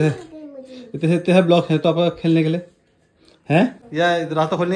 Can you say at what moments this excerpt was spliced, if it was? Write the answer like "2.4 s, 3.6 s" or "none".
3.8 s